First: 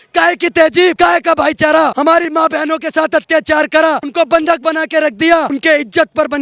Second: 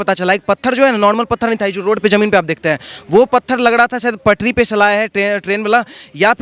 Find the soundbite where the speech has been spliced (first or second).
first